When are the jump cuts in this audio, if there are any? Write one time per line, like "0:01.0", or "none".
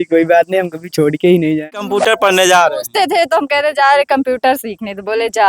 0:01.8